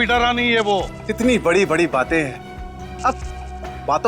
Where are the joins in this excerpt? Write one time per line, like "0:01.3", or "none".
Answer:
0:01.0